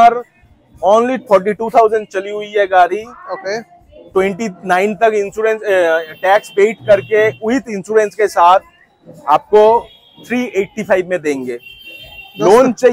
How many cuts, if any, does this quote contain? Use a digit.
0